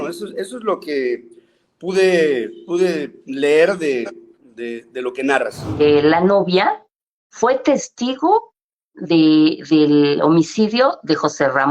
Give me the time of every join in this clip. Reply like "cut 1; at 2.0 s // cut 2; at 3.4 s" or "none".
cut 1; at 5.8 s